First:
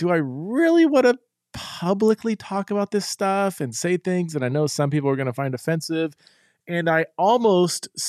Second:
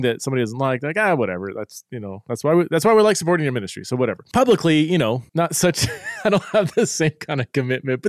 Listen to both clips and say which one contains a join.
second; 2 cuts; at 4.2 s, 5.2 s

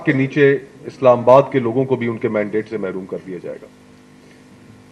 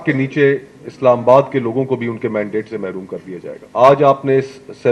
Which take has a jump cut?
second; 1 cut; at 3.6 s

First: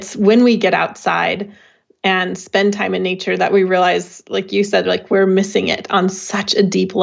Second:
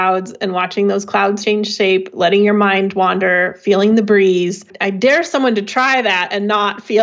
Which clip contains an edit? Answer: second; 2 cuts; at 1.4 s, 4.8 s

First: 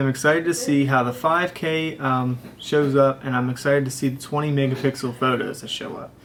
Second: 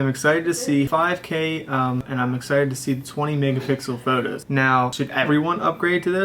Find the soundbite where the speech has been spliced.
second; 3 cuts; at 0.9 s, 2.1 s, 4.9 s

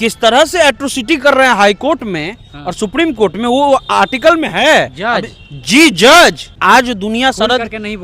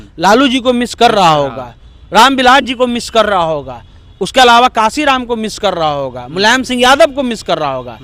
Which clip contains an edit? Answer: first; 1 cut; at 6.5 s

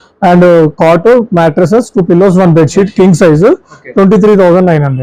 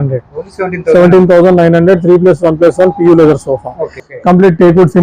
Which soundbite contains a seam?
second; 1 cut; at 4.0 s

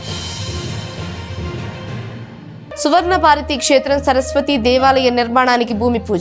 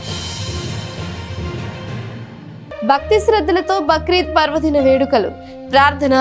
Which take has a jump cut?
first; 1 cut; at 2.8 s

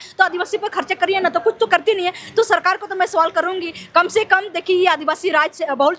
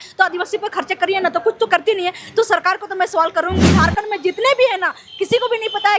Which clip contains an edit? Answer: second; 1 cut; at 3.7 s

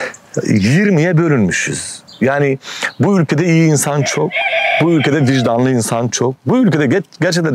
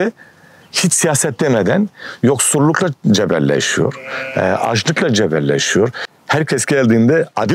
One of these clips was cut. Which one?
second; 1 cut; at 6.0 s

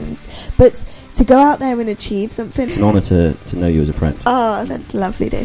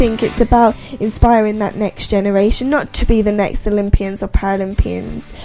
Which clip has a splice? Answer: first; 1 cut; at 2.7 s

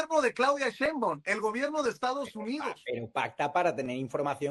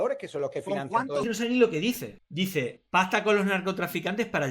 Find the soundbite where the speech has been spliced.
second; 1 cut; at 1.1 s

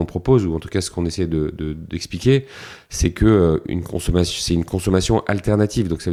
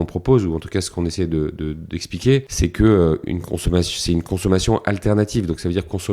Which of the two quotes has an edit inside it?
second; 1 cut; at 2.5 s

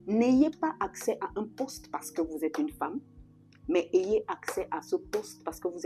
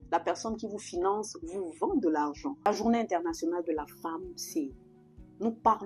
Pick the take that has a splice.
second; 1 cut; at 2.7 s

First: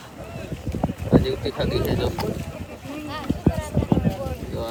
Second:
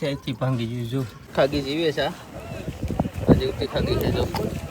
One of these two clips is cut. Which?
second; 1 cut; at 1.2 s

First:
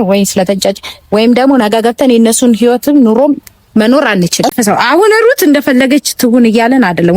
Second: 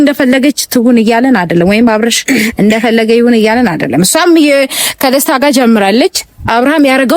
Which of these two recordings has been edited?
first; 1 cut; at 4.5 s

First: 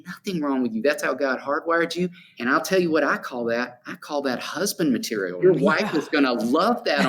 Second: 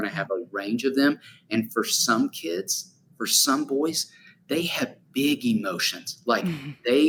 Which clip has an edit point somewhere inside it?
first; 2 cuts; at 2.3 s, 5.4 s

